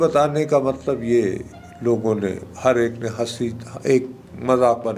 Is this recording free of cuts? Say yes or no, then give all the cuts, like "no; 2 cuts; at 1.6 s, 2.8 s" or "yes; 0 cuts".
yes; 0 cuts